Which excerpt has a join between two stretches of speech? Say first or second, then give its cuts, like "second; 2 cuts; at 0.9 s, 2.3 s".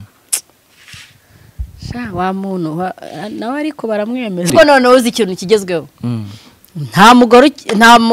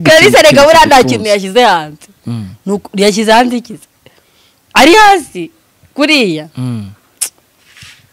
first; 1 cut; at 4.5 s